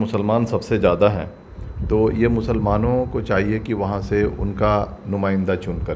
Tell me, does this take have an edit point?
no; 0 cuts

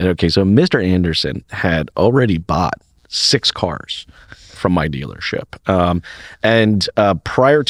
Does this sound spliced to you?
no; 0 cuts

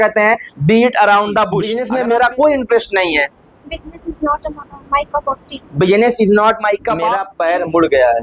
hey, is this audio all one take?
no; 2 cuts; at 1.8 s, 7.2 s

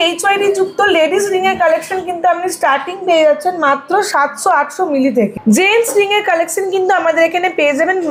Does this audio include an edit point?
no; 0 cuts

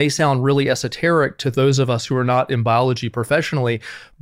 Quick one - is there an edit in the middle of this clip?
no; 0 cuts

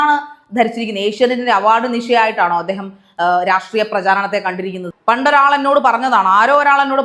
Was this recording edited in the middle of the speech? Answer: yes; 1 cut; at 4.9 s

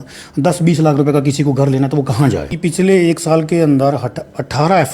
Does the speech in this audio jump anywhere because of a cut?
yes; 1 cut; at 2.5 s

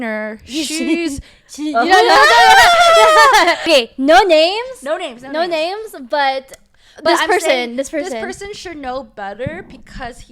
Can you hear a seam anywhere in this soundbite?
yes; 1 cut; at 3.7 s

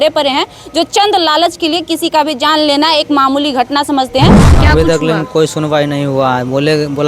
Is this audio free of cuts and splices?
no; 1 cut; at 4.4 s

